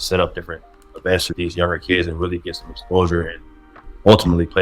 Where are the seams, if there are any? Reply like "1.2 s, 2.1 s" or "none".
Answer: 1.3 s

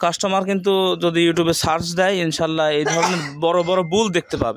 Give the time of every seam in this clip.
none

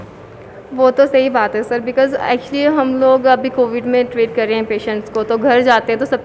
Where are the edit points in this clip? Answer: none

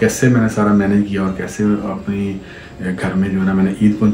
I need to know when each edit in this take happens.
none

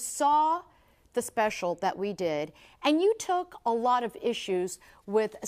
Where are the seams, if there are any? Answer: none

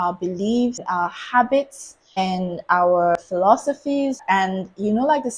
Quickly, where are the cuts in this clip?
0.8 s, 2.2 s, 3.2 s, 4.2 s

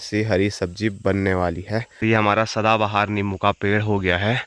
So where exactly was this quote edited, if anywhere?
1.9 s

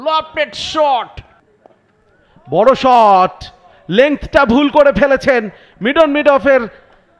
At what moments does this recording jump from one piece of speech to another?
1.2 s

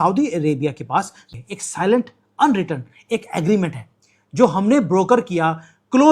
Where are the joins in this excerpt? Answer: 1.2 s

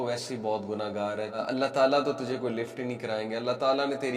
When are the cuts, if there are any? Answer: 1.4 s

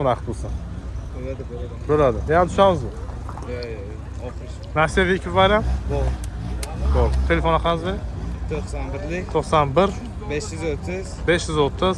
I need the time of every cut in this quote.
none

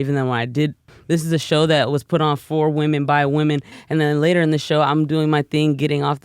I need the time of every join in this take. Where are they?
0.9 s, 3.8 s

